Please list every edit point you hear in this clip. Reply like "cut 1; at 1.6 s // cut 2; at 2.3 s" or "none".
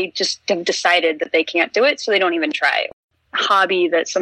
cut 1; at 2.9 s